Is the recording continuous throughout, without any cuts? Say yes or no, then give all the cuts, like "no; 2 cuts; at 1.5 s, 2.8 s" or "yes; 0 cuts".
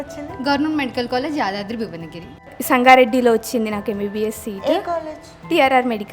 no; 1 cut; at 2.5 s